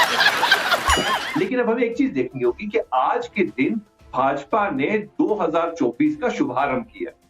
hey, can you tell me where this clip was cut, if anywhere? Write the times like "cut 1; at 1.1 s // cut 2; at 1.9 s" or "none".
cut 1; at 1.2 s